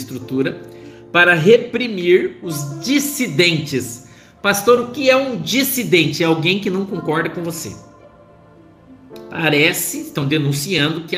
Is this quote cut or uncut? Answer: cut